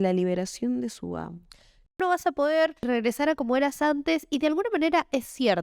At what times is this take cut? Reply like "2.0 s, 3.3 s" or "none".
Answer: 1.9 s, 2.9 s